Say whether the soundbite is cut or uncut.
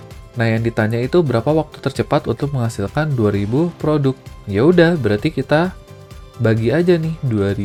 uncut